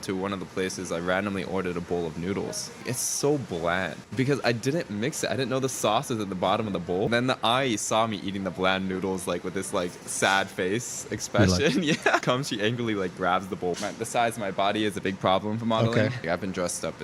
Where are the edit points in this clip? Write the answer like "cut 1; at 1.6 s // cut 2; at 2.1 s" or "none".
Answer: cut 1; at 2.8 s // cut 2; at 4.0 s // cut 3; at 7.1 s // cut 4; at 12.2 s // cut 5; at 13.8 s // cut 6; at 16.2 s